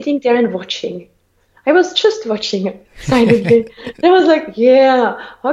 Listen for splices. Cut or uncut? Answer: uncut